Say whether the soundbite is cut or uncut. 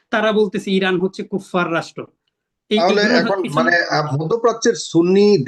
uncut